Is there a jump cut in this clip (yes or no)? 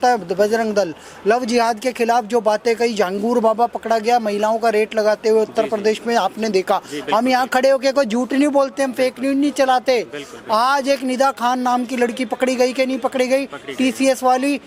no